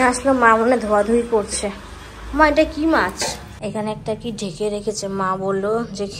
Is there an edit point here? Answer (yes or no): yes